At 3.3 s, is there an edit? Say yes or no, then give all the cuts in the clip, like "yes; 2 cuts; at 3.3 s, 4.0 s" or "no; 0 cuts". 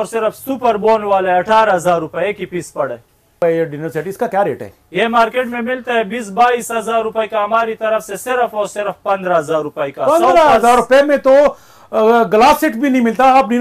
yes; 1 cut; at 3.3 s